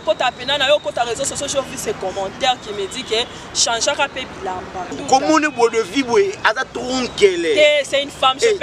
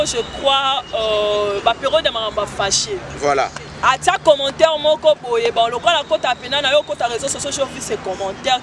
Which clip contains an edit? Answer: first; 1 cut; at 4.9 s

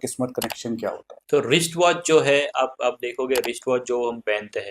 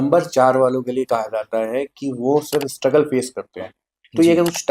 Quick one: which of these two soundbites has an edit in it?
first; 1 cut; at 1.1 s

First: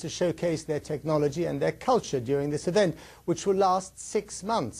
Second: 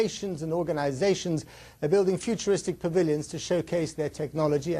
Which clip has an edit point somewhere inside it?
first; 1 cut; at 3.1 s

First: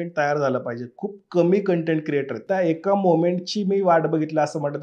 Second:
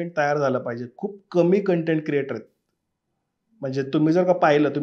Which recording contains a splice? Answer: first; 1 cut; at 2.4 s

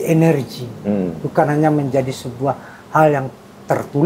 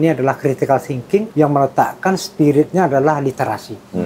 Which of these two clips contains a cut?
second; 1 cut; at 1.3 s

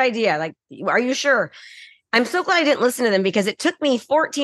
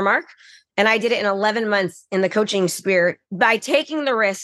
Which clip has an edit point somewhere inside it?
second; 1 cut; at 3.2 s

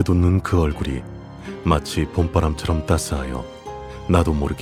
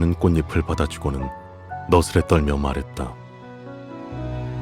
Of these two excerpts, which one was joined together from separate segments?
second; 1 cut; at 3.2 s

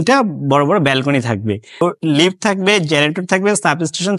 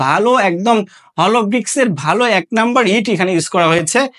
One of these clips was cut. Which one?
first; 1 cut; at 1.8 s

